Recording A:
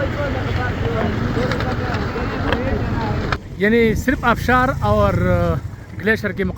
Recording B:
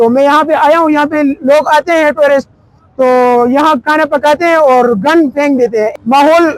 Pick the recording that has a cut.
A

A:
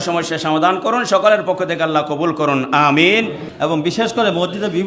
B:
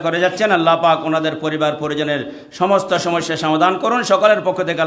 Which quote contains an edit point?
A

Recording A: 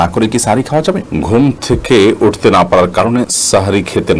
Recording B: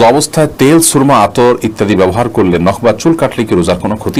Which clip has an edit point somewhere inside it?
A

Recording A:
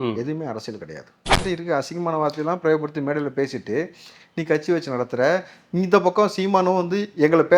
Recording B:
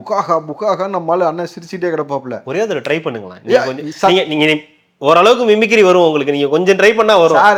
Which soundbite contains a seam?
A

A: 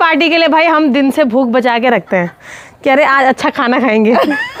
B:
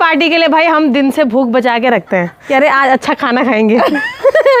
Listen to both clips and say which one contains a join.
B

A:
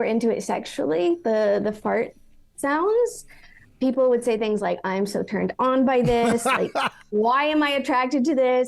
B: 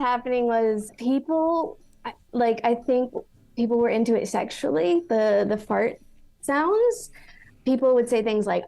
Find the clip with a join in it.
B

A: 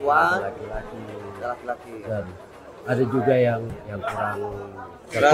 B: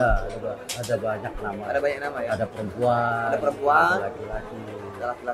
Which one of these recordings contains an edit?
A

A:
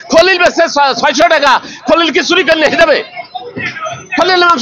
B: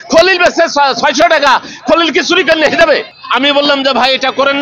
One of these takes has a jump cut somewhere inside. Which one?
B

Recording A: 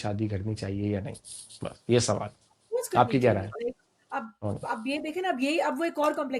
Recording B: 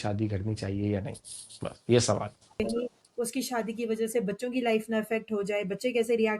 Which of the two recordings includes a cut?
B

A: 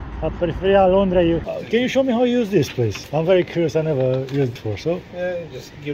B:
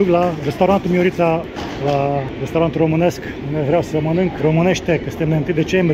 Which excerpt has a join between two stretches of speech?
A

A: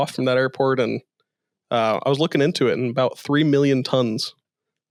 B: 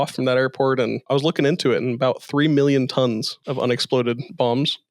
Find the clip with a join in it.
B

